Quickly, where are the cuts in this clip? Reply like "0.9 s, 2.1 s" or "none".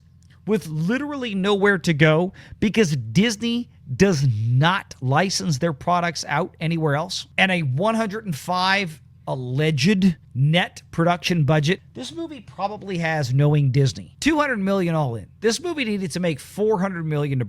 7.2 s, 10.3 s, 11.9 s, 14.1 s

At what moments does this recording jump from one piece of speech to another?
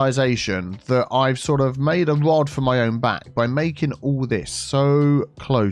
none

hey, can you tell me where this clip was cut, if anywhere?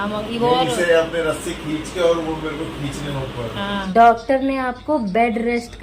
3.9 s

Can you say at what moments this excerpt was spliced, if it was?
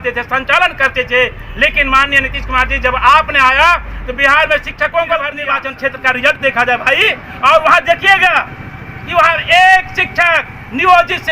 5.4 s

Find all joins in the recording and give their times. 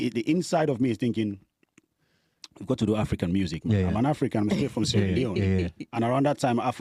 none

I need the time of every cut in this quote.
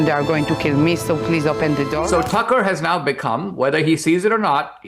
2.1 s

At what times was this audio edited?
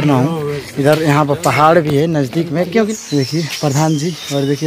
2.9 s

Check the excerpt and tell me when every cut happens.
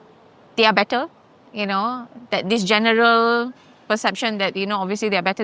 none

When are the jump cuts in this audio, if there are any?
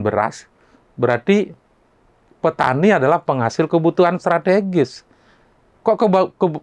none

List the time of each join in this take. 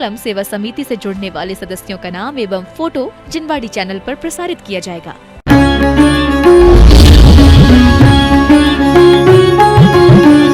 5.3 s

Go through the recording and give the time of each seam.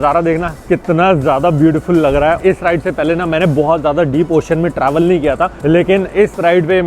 2.4 s, 5.6 s

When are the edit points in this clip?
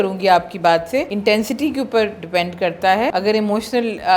1.1 s, 3.1 s

